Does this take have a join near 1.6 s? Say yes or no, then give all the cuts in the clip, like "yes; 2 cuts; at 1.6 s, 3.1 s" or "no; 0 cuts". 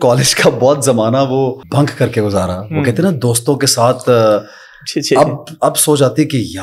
yes; 1 cut; at 1.6 s